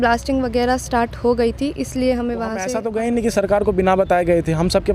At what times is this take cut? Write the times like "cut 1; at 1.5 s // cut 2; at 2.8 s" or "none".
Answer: cut 1; at 2.7 s